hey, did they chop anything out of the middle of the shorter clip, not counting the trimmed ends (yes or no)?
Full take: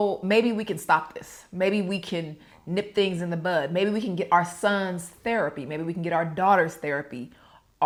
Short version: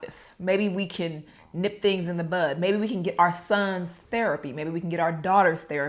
no